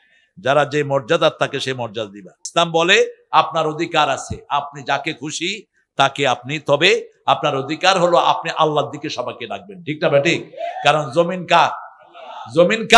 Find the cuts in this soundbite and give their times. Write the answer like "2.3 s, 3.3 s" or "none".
2.4 s